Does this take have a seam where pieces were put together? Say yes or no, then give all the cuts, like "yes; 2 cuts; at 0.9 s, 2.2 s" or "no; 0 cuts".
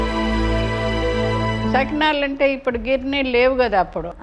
yes; 1 cut; at 1.7 s